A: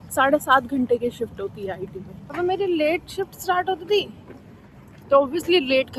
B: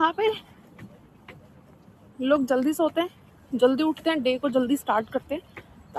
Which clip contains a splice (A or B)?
A